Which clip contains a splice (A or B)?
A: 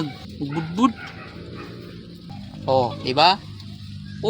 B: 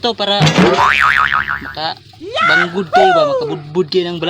A